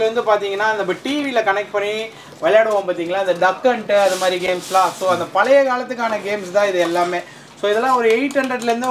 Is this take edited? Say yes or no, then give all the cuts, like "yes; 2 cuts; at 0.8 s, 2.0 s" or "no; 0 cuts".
no; 0 cuts